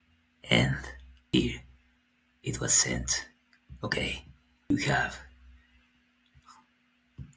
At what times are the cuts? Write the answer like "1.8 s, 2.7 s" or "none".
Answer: 1.2 s, 4.7 s